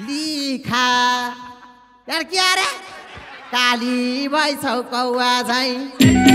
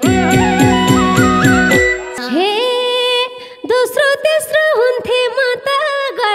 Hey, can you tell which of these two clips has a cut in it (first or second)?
second